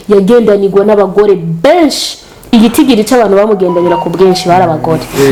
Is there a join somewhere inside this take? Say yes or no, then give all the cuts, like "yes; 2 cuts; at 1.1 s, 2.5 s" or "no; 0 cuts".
no; 0 cuts